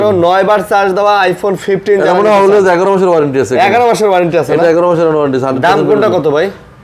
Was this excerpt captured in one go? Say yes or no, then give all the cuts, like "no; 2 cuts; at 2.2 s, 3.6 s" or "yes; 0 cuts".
yes; 0 cuts